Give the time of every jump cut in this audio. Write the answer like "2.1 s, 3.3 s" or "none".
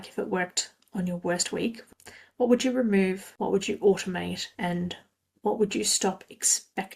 2.0 s, 3.3 s, 4.5 s